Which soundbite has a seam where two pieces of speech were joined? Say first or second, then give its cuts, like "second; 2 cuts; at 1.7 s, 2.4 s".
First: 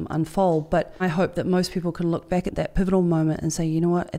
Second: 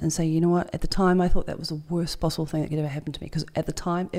first; 2 cuts; at 1.0 s, 2.5 s